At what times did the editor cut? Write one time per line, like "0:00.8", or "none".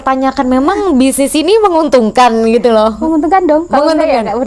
none